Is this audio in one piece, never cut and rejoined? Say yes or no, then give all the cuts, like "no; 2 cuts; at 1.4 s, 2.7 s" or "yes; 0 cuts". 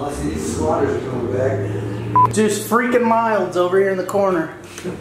no; 1 cut; at 2.3 s